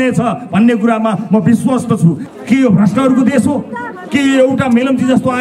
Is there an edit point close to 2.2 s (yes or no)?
yes